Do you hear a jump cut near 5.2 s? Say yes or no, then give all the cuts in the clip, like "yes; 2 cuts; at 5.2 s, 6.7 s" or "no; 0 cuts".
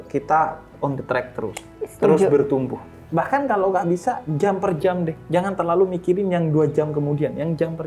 no; 1 cut; at 2.9 s